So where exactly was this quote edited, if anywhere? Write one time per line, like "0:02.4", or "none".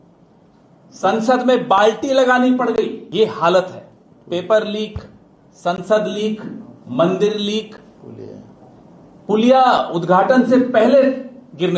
0:03.0